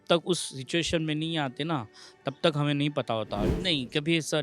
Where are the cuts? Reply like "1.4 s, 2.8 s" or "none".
3.5 s